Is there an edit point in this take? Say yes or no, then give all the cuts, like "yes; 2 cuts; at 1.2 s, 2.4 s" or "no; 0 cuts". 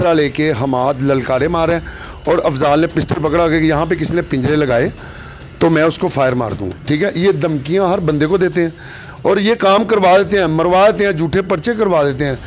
yes; 1 cut; at 6.7 s